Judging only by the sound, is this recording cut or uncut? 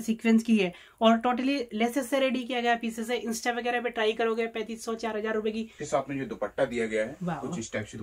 cut